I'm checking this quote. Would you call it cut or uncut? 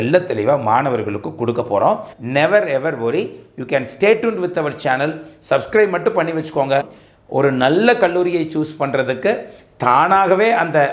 cut